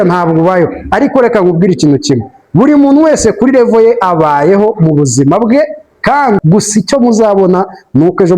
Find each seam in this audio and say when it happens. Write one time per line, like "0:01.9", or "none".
0:06.4

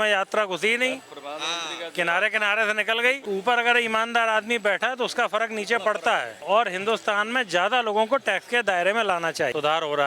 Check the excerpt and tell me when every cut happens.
0:03.2
0:06.4

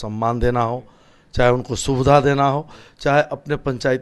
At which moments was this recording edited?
none

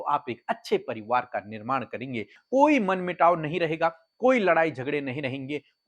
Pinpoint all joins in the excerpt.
0:02.4

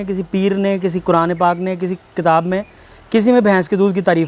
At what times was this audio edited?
none

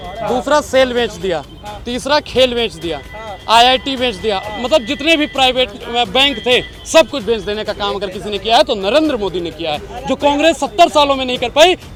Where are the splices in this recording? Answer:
none

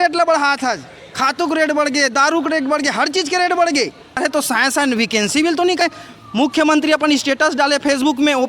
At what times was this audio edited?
0:04.2
0:05.8

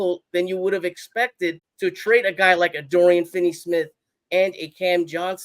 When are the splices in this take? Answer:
0:01.7

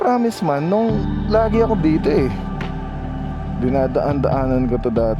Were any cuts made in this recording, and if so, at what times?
none

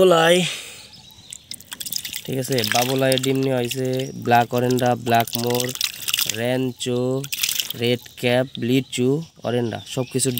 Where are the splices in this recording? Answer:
none

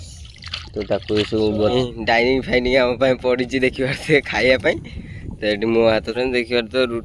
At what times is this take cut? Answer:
0:01.7
0:06.0

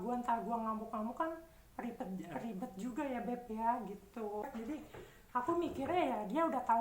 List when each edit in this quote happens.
0:04.4

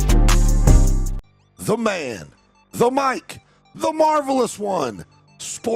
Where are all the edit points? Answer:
0:01.0

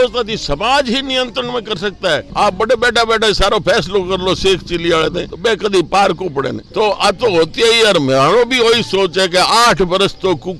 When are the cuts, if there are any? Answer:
0:02.3
0:06.7

